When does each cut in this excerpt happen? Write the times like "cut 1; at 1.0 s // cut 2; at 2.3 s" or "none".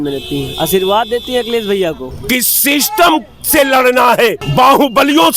cut 1; at 2.1 s // cut 2; at 4.4 s